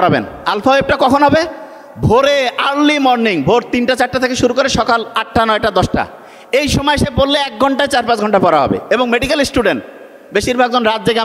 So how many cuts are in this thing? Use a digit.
0